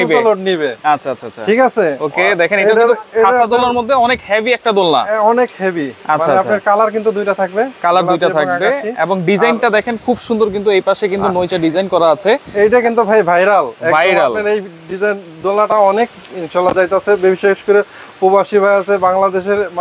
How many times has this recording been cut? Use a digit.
0